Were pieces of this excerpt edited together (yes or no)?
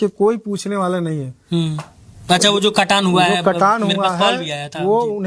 no